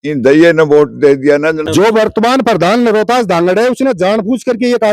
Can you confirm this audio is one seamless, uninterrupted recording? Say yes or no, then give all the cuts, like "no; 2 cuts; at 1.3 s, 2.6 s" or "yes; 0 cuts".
no; 1 cut; at 1.6 s